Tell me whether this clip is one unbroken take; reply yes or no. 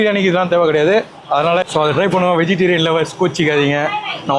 no